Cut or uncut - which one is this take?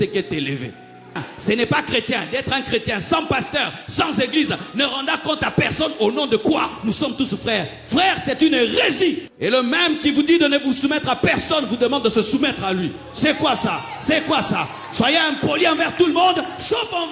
cut